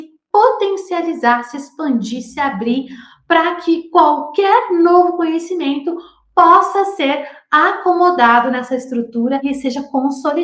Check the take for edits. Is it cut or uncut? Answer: cut